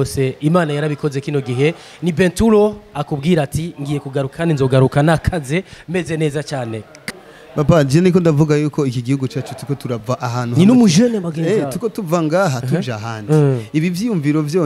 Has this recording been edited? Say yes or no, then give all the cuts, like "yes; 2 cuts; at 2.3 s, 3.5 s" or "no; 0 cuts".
yes; 1 cut; at 6.9 s